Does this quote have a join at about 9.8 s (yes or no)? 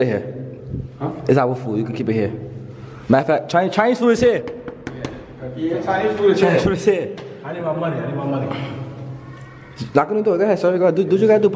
no